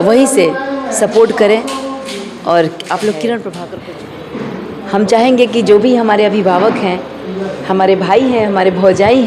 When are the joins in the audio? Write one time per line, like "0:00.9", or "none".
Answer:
0:03.5